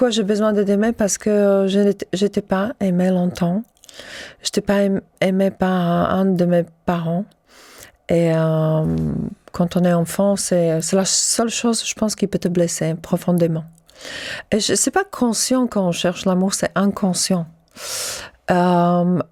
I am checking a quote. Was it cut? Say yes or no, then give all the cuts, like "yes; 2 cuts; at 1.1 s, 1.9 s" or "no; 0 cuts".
no; 0 cuts